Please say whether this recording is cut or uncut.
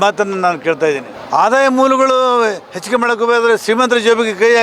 cut